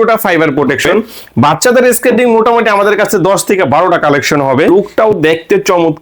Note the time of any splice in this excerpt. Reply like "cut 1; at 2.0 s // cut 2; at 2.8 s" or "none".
cut 1; at 1.2 s // cut 2; at 4.7 s